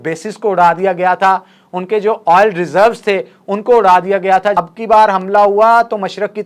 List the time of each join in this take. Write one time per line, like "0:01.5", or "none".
0:04.6

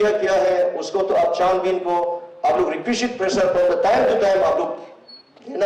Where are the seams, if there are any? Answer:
none

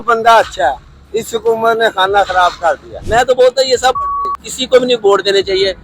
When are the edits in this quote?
0:02.9
0:04.0

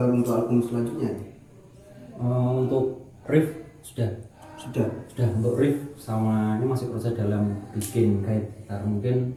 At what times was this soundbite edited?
none

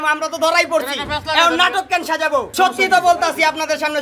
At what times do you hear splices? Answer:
0:02.5

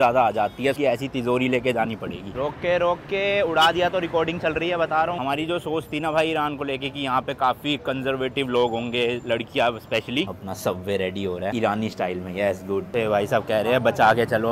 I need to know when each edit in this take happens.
0:00.8
0:02.3
0:05.2
0:10.3
0:12.9

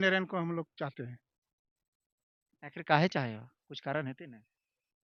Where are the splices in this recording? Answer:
none

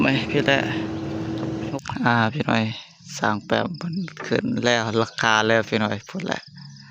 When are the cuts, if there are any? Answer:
0:01.7

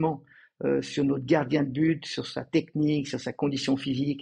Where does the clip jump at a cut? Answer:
none

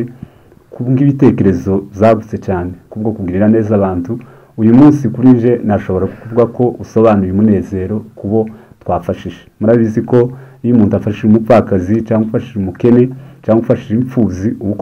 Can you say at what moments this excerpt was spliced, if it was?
none

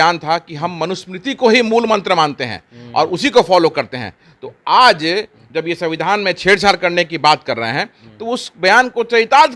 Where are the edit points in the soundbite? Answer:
none

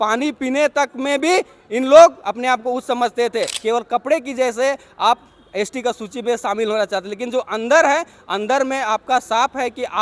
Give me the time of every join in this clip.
0:03.5

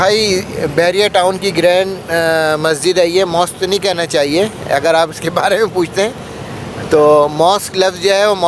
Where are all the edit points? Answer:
none

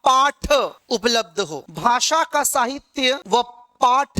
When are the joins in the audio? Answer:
0:01.7

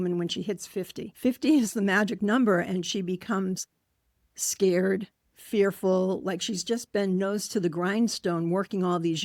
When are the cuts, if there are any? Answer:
0:01.0

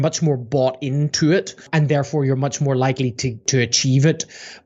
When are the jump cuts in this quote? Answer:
0:01.7
0:03.5

